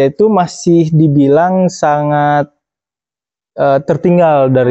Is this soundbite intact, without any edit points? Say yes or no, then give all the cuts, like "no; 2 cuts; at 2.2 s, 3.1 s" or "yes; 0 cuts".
yes; 0 cuts